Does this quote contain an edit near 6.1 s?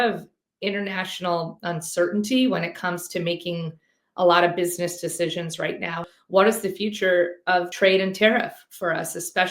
yes; 2 cuts; at 6.1 s, 7.7 s

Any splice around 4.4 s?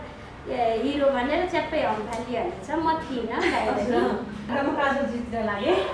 yes; 1 cut; at 4.4 s

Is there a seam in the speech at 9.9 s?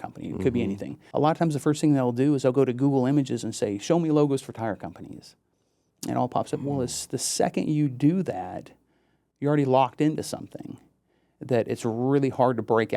no; 1 cut; at 0.9 s

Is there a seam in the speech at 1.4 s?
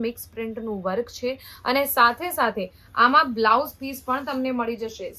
no; 0 cuts

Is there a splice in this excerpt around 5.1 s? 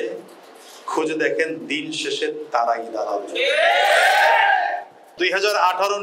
yes; 1 cut; at 5.1 s

